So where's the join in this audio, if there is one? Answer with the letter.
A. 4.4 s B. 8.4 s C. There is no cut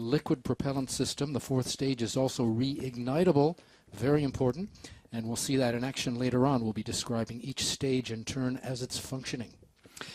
A